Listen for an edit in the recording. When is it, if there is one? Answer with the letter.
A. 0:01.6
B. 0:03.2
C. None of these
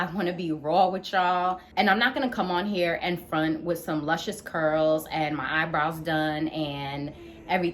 A